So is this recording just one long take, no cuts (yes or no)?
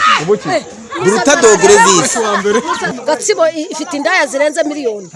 no